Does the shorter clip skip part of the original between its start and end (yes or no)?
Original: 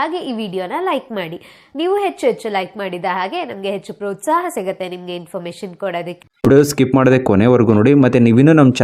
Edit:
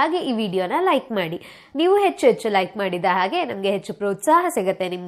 no